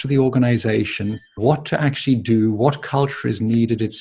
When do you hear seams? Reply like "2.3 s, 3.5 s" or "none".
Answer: 1.2 s